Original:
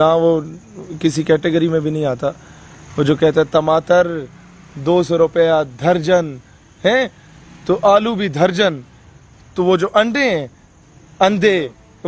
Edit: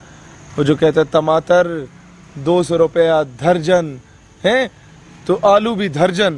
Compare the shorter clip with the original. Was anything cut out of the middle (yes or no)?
no